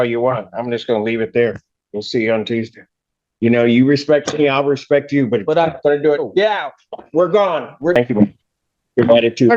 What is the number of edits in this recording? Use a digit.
1